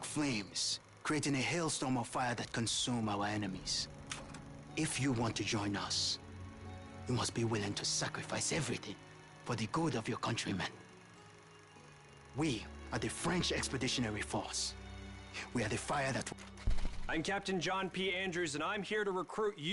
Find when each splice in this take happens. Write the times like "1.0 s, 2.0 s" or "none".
16.3 s, 17.9 s

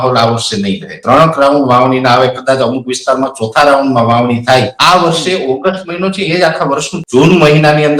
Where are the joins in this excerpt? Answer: 0.9 s, 4.8 s, 6.9 s

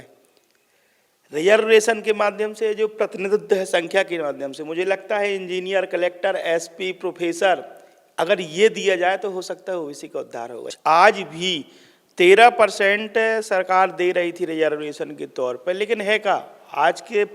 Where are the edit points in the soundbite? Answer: 10.6 s

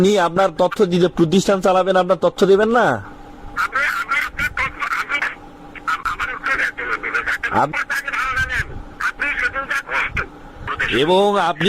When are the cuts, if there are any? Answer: 10.7 s

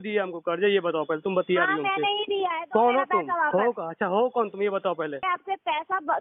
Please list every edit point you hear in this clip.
5.2 s

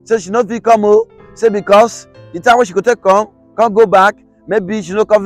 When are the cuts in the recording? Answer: none

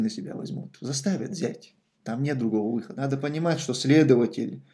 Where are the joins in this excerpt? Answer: 3.0 s

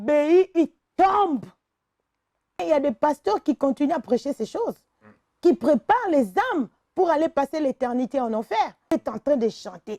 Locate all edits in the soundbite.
2.6 s, 8.9 s

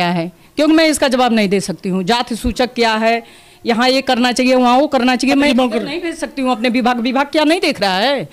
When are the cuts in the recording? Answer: 5.5 s

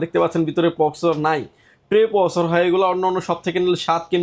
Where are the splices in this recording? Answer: none

